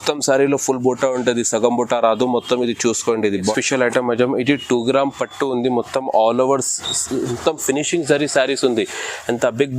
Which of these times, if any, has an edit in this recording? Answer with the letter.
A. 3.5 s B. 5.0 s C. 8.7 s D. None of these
A